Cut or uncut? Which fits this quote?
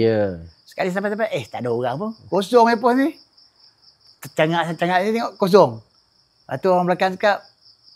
uncut